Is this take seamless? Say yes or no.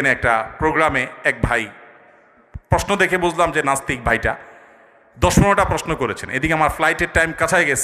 yes